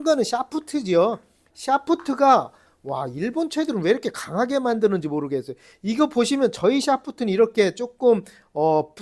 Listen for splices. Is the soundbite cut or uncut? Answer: uncut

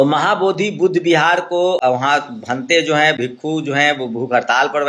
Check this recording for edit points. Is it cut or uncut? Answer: cut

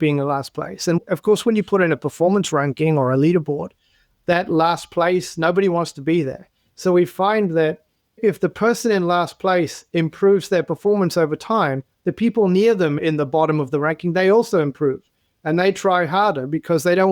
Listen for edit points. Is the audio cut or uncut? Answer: cut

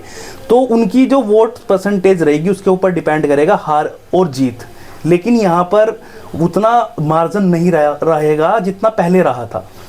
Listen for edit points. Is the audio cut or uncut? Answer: uncut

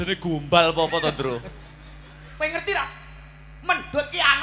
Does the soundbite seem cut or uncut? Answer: cut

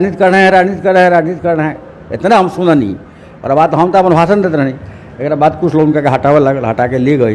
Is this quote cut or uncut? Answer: uncut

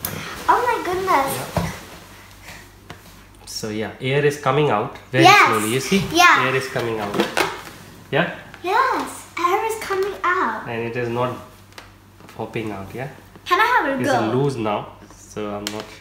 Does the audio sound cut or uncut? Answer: uncut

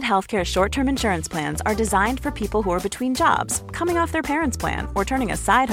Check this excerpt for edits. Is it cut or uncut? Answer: uncut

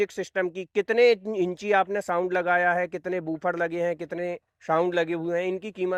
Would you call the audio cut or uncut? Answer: uncut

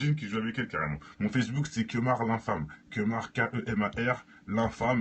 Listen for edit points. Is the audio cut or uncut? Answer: cut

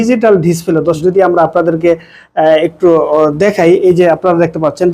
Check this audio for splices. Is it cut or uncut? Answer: cut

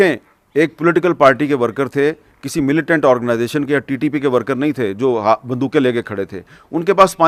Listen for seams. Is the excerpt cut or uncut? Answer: uncut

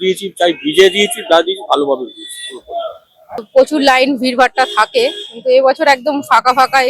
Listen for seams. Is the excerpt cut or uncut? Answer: cut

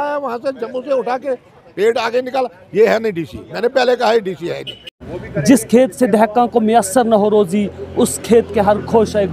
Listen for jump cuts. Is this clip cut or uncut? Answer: cut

